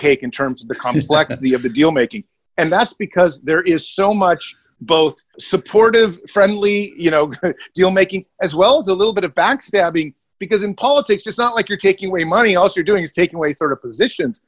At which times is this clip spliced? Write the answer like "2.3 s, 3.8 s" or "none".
5.0 s